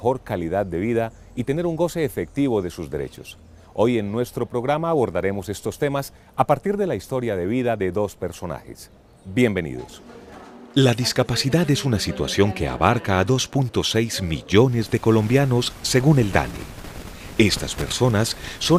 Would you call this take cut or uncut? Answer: uncut